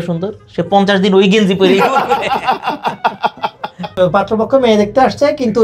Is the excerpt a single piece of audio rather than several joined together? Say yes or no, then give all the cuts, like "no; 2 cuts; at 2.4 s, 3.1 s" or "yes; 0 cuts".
no; 1 cut; at 3.9 s